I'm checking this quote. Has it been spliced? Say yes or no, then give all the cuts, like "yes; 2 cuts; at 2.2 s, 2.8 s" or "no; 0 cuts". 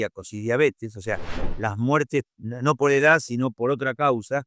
yes; 1 cut; at 2.3 s